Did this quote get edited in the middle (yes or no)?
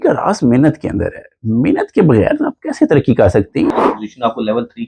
yes